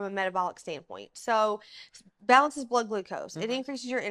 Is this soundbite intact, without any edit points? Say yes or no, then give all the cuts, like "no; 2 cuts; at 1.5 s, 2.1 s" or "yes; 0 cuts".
yes; 0 cuts